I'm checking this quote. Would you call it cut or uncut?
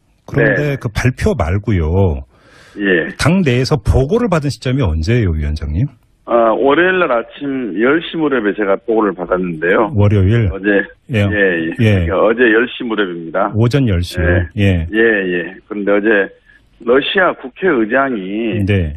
uncut